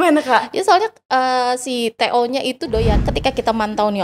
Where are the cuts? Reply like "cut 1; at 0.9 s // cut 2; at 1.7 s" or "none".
cut 1; at 3.1 s